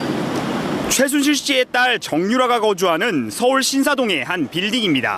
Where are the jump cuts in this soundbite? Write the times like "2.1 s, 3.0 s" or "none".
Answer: none

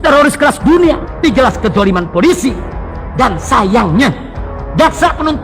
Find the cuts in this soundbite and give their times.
1.2 s

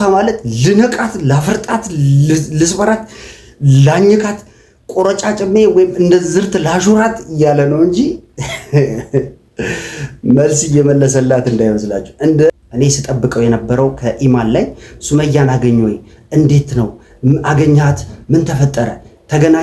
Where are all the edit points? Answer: 12.5 s

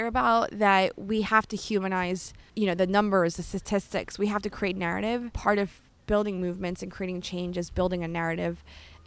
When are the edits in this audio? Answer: 2.4 s, 5.3 s

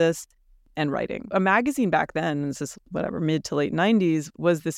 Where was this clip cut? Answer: 1.3 s

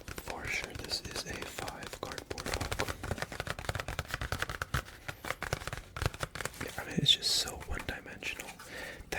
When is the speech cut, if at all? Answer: 2.9 s

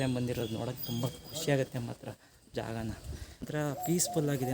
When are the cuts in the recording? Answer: 3.5 s

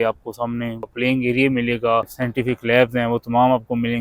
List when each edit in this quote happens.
0.8 s, 2.2 s

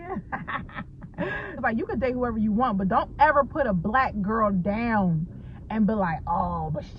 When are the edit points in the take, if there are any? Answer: 1.6 s

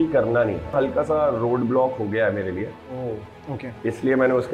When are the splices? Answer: 0.7 s, 3.2 s

